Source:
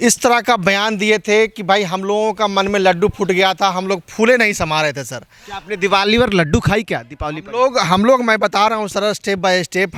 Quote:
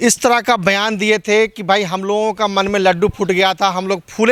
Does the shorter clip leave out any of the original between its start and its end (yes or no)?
no